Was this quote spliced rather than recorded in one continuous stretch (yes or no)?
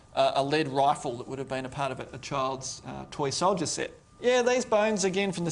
yes